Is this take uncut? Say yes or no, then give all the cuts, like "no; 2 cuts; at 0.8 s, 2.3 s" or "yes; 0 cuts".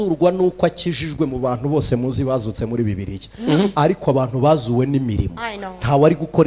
yes; 0 cuts